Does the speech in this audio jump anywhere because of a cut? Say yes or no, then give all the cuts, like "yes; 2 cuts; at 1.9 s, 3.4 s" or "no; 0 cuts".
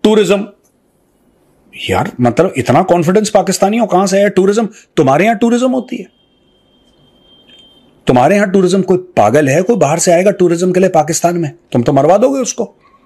no; 0 cuts